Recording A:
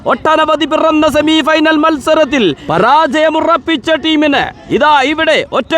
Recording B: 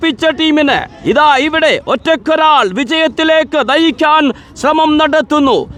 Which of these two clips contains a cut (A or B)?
A